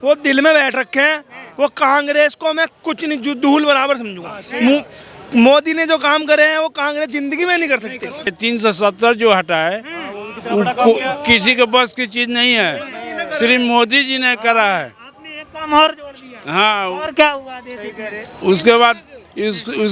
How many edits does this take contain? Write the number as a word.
one